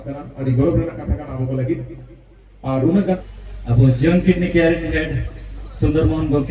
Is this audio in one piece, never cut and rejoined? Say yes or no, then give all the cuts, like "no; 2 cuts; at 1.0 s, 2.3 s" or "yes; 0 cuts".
no; 1 cut; at 3.2 s